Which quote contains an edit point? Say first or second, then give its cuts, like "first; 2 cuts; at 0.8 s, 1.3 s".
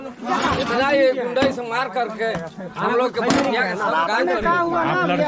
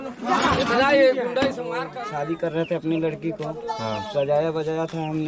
second; 1 cut; at 1.9 s